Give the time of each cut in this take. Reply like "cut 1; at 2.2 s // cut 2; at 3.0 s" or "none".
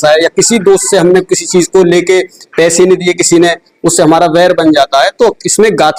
none